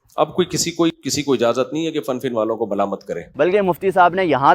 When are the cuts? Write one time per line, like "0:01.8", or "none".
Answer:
0:01.0
0:03.2